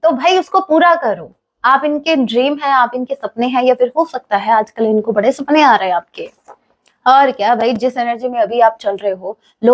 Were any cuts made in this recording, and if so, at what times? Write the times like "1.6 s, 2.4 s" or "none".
none